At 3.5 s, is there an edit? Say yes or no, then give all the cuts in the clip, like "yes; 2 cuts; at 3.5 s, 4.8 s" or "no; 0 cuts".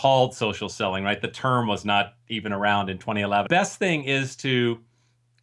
yes; 1 cut; at 3.5 s